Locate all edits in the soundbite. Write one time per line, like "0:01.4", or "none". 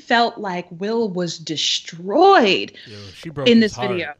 none